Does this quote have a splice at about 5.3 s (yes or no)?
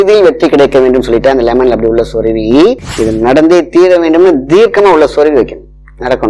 no